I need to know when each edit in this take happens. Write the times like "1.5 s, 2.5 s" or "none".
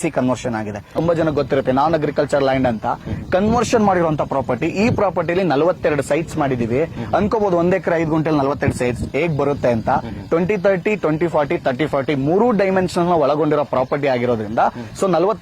0.9 s